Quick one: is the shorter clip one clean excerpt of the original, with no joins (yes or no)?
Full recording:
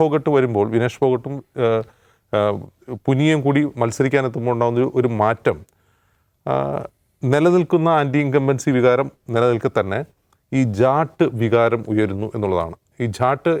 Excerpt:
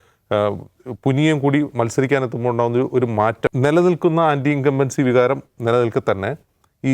no